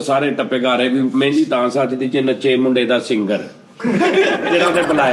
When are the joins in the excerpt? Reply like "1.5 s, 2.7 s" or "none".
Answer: none